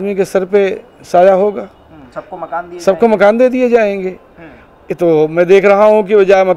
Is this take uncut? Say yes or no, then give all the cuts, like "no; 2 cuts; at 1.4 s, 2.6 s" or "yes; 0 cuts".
yes; 0 cuts